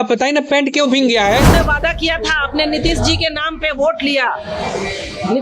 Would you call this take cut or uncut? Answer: cut